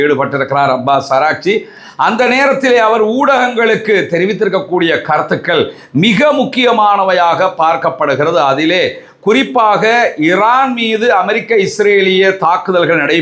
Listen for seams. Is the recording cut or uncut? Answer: uncut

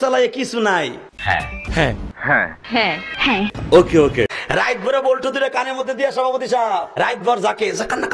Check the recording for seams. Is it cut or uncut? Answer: uncut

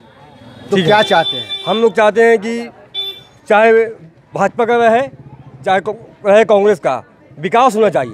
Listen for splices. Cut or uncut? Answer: uncut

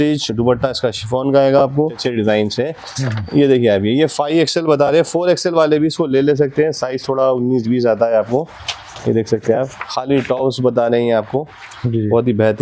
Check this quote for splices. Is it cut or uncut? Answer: cut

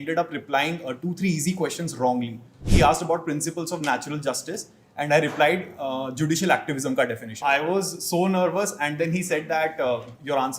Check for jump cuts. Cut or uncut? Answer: cut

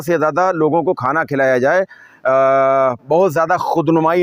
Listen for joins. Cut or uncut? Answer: uncut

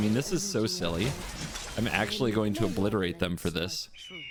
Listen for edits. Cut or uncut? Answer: uncut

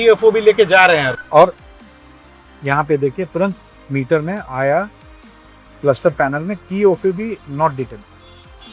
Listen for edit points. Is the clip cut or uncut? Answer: uncut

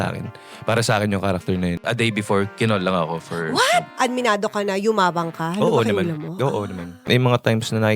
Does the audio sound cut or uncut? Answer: cut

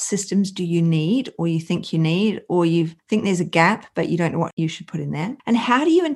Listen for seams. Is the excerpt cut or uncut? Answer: cut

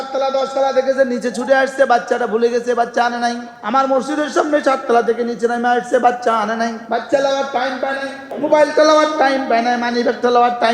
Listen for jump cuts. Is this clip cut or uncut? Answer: cut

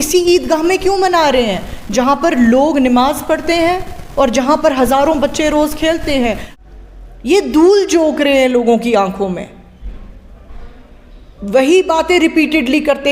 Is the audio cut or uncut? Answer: cut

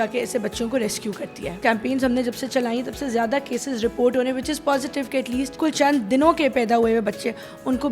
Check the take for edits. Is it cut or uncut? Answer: cut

